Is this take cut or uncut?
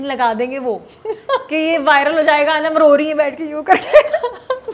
uncut